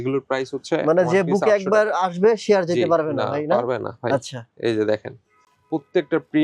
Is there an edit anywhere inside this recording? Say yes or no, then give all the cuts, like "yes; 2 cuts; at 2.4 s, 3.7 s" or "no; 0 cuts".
no; 0 cuts